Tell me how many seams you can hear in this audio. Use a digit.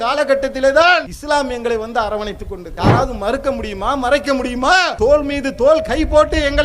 3